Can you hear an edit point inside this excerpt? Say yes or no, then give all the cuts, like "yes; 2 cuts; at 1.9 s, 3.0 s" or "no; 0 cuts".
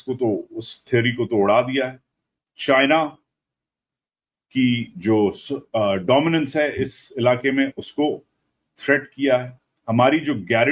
no; 0 cuts